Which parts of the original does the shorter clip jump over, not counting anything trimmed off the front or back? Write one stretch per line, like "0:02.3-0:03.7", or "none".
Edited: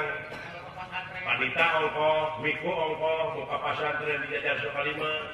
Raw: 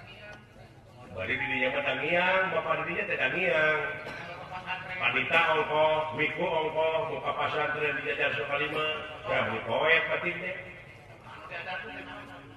none